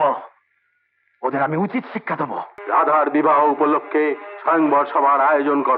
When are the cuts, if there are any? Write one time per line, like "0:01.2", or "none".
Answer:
0:02.5